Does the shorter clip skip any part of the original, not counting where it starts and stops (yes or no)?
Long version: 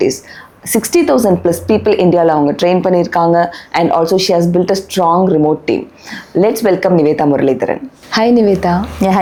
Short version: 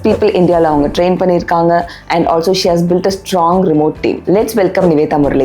yes